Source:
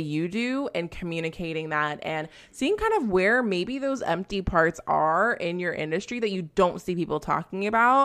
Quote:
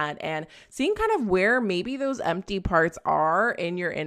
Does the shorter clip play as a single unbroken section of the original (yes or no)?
yes